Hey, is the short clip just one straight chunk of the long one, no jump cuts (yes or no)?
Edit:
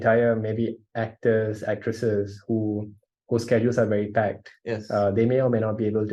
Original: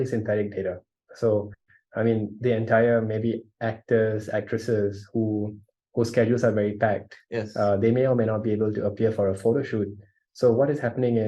yes